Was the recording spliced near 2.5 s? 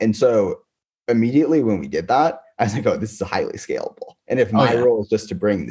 no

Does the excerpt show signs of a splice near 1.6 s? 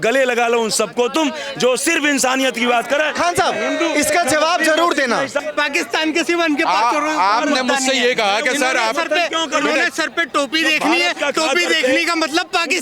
no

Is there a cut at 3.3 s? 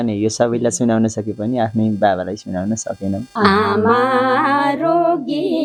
yes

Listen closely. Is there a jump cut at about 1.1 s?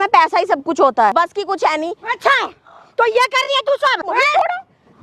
yes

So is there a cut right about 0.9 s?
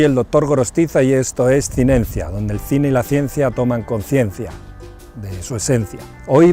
yes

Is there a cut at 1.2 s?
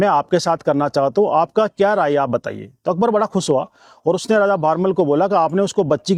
no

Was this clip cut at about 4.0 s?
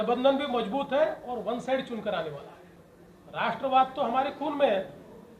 no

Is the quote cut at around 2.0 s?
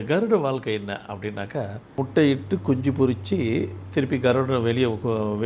yes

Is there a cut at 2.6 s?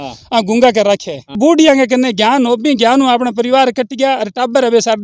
no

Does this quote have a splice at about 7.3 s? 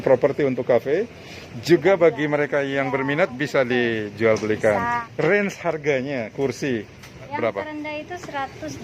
yes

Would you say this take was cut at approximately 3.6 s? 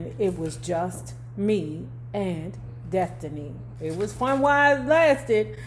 yes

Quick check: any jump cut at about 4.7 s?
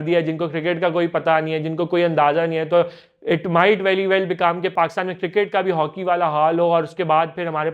yes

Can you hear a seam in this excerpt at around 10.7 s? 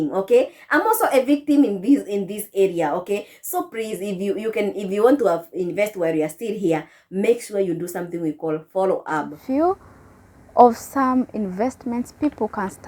no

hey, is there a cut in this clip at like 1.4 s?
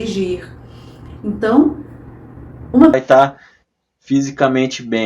no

